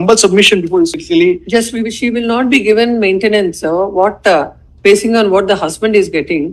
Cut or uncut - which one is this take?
cut